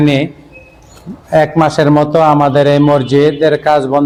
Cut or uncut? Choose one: uncut